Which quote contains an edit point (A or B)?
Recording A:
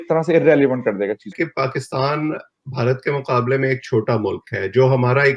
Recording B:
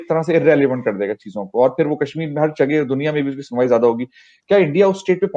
A